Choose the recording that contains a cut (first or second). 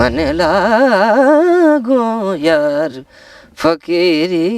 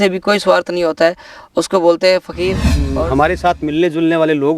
second